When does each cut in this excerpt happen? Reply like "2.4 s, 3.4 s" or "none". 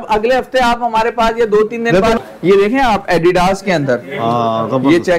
2.2 s